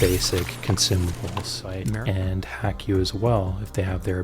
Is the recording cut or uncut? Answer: cut